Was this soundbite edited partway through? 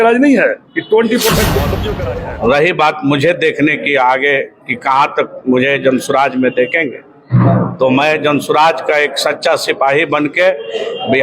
yes; 1 cut; at 1.8 s

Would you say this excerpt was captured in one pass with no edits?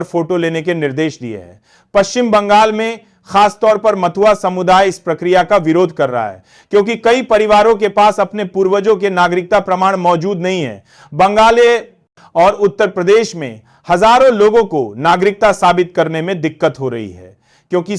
yes; 0 cuts

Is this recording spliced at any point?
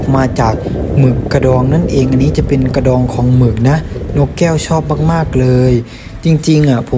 no; 0 cuts

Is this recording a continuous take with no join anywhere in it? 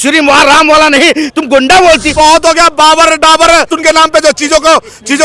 no; 2 cuts; at 2.1 s, 3.8 s

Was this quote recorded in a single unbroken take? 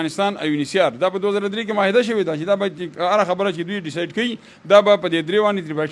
yes; 0 cuts

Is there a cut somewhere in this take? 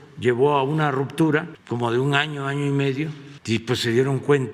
yes; 2 cuts; at 1.6 s, 3.3 s

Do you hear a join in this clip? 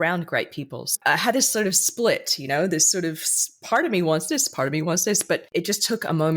yes; 2 cuts; at 0.9 s, 5.5 s

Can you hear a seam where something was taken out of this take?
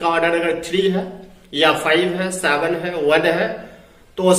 no; 0 cuts

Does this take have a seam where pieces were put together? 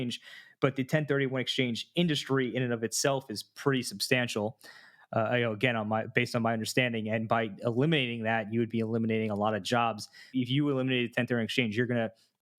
yes; 1 cut; at 10.3 s

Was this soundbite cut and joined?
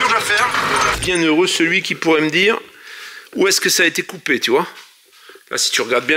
yes; 1 cut; at 1.0 s

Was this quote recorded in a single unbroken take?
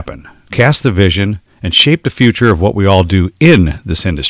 yes; 0 cuts

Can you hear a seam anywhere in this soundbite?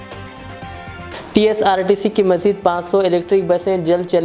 no; 0 cuts

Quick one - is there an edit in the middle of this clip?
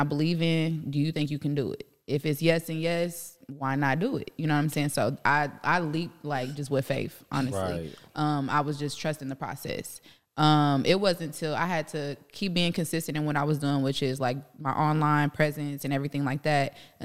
no; 0 cuts

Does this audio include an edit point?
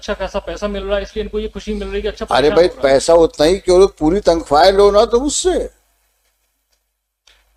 no; 0 cuts

